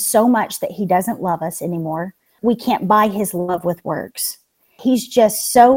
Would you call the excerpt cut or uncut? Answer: cut